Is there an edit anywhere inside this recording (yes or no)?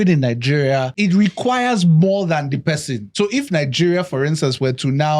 yes